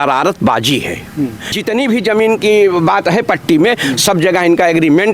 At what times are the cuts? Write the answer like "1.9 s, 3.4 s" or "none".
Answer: 1.5 s